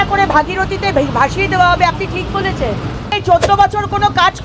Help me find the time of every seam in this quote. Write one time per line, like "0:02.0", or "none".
0:03.1